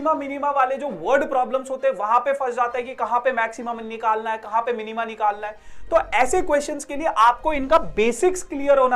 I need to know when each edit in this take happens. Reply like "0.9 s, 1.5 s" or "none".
none